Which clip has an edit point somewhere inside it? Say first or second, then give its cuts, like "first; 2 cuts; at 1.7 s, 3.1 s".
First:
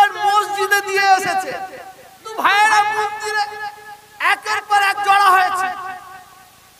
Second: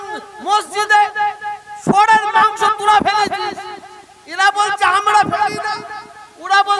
first; 1 cut; at 2.2 s